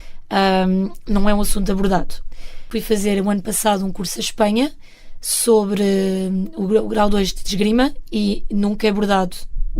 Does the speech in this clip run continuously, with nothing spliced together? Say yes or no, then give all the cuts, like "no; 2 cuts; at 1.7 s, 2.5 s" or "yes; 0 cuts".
no; 1 cut; at 2.7 s